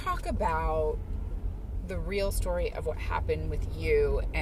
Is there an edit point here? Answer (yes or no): no